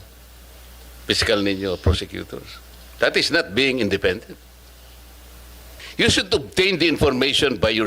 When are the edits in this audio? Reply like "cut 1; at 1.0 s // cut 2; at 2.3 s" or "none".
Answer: cut 1; at 5.8 s